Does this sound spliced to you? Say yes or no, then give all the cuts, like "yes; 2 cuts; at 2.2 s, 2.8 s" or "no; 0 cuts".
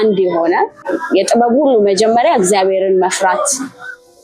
yes; 1 cut; at 1.0 s